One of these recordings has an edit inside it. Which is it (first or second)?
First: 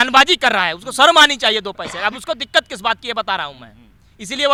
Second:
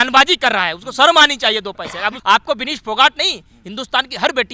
second